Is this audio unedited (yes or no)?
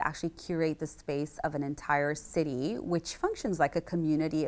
yes